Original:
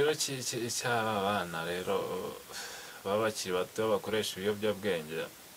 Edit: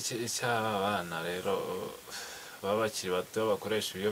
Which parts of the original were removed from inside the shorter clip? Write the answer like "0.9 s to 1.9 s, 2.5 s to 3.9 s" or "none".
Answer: none